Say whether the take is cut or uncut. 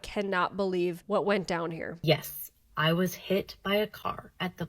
cut